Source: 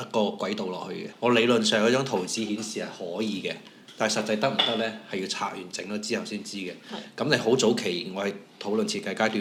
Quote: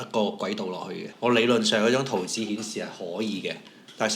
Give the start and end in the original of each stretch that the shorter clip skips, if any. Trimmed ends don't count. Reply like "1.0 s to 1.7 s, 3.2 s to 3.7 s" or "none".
none